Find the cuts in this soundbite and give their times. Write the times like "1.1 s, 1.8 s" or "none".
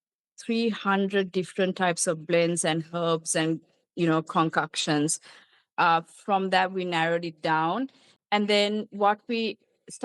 none